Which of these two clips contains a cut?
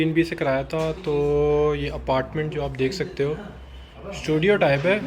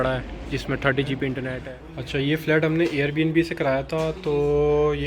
second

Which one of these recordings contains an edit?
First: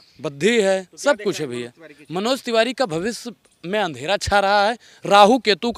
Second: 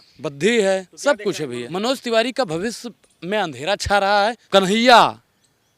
second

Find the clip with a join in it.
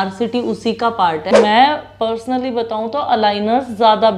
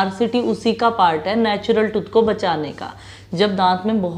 first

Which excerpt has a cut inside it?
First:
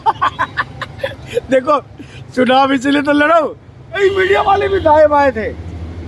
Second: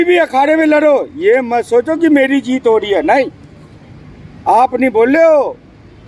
first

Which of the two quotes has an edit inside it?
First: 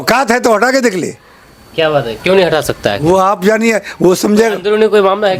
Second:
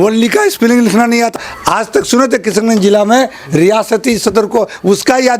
second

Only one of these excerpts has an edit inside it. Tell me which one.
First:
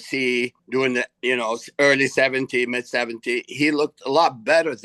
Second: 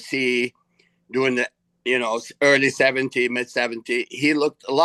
first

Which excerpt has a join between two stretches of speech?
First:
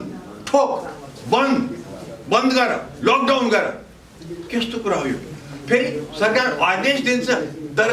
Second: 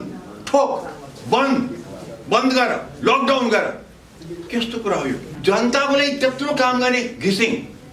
second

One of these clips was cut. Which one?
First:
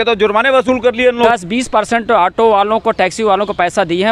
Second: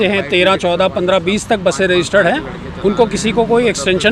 first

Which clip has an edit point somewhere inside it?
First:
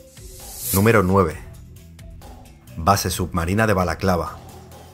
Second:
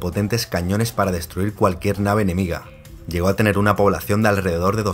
first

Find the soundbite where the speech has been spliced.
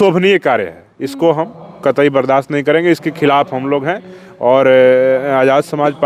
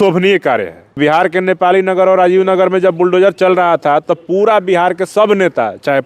second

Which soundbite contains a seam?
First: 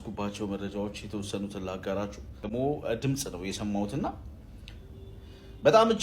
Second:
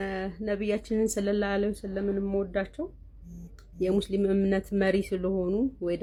first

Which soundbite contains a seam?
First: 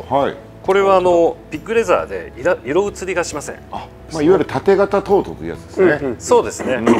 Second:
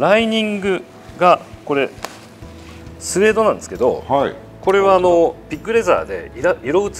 first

